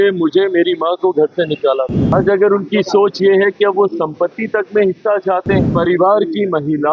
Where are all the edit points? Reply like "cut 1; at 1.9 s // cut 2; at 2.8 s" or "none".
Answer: cut 1; at 2.1 s // cut 2; at 5.7 s